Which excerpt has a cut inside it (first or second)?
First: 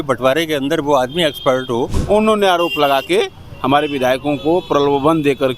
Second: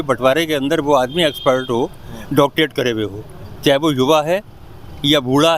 first